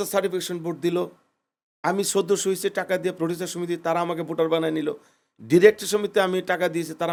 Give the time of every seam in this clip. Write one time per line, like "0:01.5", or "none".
none